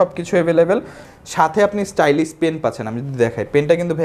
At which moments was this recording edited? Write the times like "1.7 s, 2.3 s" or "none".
1.0 s